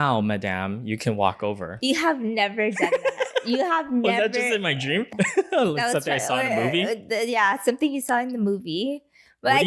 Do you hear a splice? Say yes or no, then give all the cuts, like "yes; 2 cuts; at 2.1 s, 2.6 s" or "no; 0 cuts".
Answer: yes; 1 cut; at 5.1 s